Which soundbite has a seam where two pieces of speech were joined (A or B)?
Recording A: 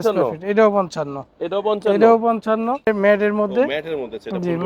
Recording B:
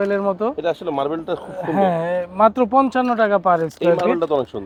A